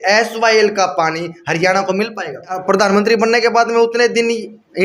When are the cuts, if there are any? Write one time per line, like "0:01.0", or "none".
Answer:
0:02.6